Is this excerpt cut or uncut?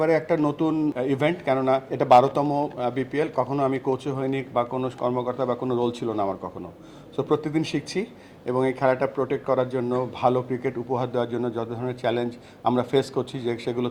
cut